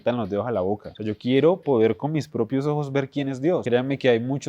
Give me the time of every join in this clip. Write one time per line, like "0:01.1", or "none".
0:00.9
0:03.6